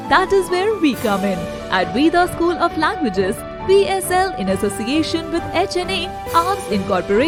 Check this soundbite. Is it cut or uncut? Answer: uncut